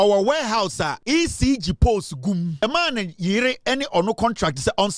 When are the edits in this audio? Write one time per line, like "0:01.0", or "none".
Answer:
0:01.0
0:02.6